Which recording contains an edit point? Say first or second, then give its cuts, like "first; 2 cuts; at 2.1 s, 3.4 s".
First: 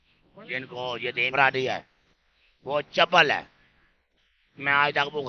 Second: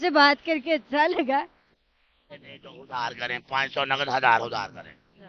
first; 1 cut; at 1.3 s